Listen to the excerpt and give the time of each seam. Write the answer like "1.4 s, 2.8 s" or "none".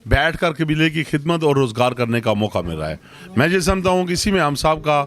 none